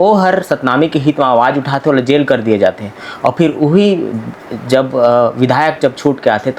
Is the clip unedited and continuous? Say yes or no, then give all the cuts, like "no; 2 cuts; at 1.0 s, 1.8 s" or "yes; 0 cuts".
yes; 0 cuts